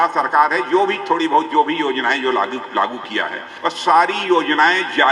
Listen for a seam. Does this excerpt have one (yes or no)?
yes